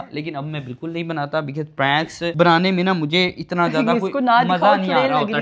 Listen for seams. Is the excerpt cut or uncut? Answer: uncut